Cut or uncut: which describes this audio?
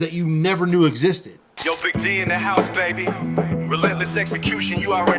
cut